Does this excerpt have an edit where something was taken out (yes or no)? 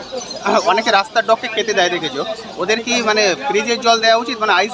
no